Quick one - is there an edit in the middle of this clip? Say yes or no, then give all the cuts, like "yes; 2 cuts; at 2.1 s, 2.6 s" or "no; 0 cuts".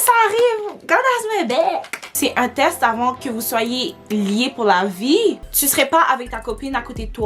yes; 2 cuts; at 2.0 s, 5.4 s